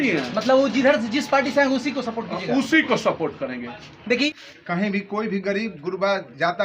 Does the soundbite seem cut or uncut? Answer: cut